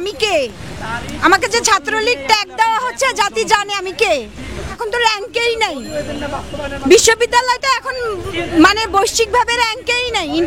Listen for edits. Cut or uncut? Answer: cut